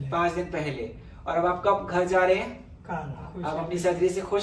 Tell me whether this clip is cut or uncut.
cut